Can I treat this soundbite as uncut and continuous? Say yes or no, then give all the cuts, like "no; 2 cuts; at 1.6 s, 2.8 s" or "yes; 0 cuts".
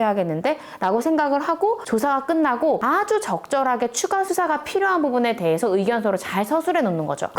yes; 0 cuts